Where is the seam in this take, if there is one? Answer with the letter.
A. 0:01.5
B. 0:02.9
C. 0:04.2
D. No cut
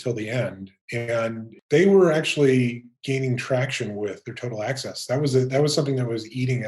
A